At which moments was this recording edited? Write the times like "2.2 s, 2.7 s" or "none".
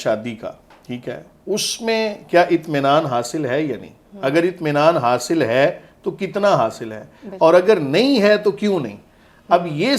none